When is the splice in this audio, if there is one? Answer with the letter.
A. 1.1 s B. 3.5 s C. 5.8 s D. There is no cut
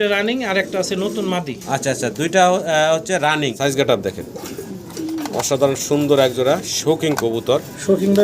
B